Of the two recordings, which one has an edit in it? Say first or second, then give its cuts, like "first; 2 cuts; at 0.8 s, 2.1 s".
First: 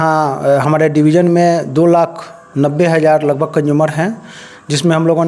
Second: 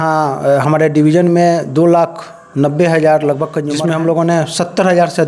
second; 1 cut; at 3.8 s